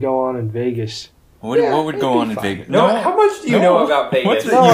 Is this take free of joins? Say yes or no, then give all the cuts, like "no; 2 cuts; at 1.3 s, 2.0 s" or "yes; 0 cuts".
yes; 0 cuts